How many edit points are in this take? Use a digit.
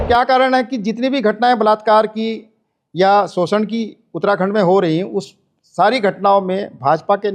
0